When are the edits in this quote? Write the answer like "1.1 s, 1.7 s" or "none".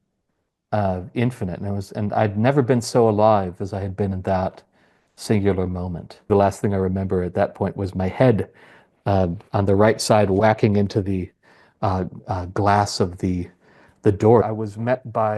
6.3 s, 14.4 s